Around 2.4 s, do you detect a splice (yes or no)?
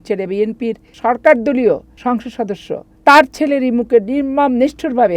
yes